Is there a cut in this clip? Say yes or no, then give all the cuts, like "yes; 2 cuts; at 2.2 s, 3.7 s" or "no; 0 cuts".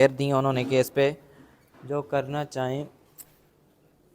no; 0 cuts